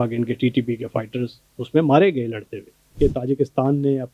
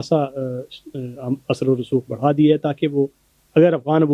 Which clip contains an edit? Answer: first; 1 cut; at 3.0 s

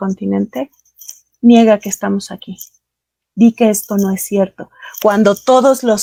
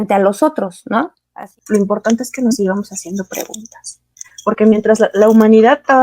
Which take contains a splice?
second; 1 cut; at 1.2 s

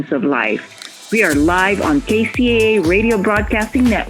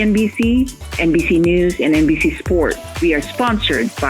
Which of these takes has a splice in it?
second; 1 cut; at 2.9 s

